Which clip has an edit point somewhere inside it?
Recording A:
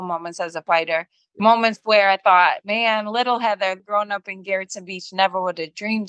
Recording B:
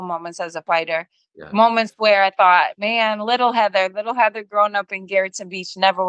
A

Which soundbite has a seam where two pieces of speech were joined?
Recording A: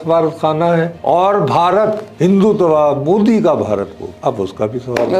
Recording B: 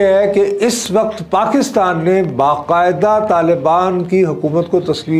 A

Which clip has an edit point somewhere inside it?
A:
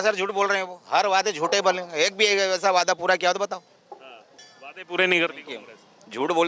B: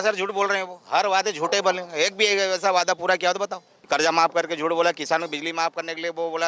B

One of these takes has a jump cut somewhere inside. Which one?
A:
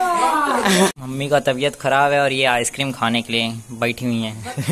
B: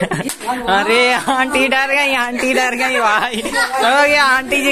A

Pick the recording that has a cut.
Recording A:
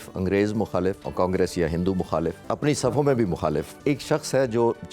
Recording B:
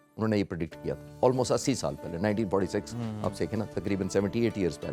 A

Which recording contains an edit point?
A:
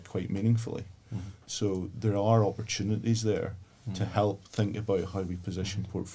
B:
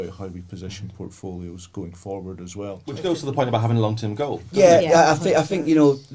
B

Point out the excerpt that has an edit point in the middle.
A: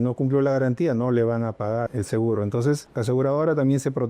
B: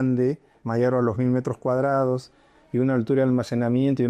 A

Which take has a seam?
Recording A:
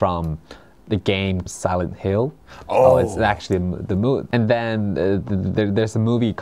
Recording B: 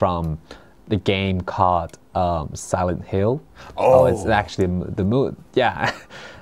A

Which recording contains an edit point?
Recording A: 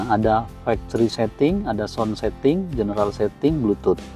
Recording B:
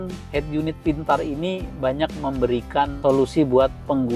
B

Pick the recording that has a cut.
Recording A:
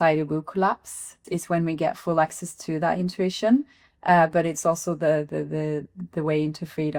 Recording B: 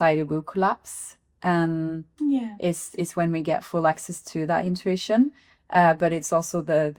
A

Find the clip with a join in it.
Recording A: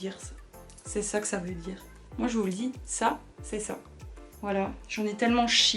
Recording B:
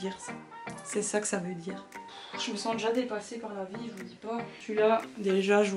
B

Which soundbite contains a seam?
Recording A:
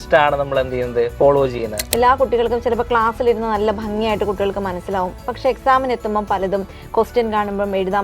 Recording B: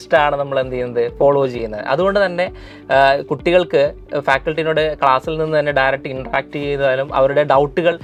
A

